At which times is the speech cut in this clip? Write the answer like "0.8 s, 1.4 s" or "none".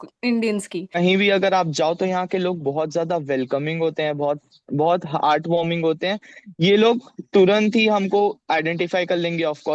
1.0 s